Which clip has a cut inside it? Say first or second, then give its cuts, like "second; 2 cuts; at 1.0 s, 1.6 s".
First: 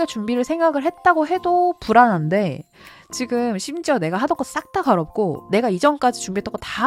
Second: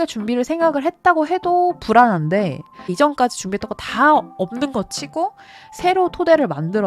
second; 1 cut; at 2.9 s